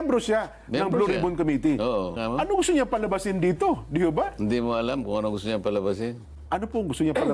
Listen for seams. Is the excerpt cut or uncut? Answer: cut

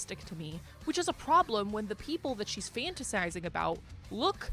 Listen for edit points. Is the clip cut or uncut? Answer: uncut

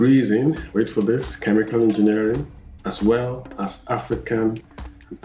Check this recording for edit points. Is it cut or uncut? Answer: uncut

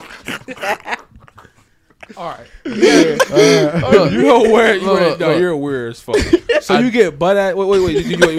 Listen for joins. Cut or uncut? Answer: uncut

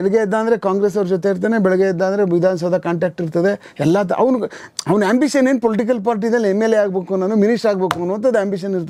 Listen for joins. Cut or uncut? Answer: uncut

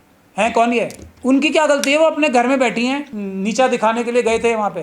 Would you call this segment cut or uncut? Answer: cut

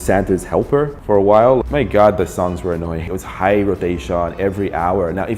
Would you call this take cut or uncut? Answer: cut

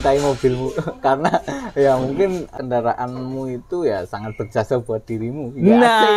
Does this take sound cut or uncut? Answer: cut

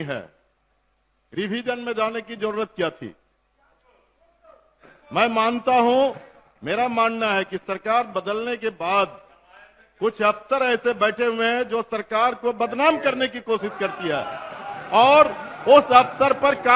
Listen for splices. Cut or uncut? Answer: uncut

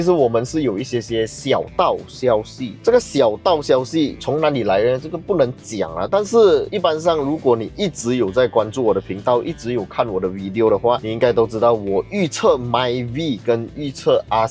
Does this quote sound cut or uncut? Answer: uncut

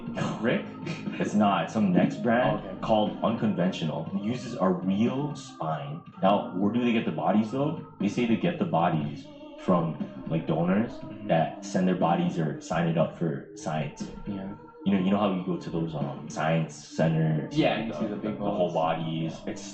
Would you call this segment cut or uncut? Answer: cut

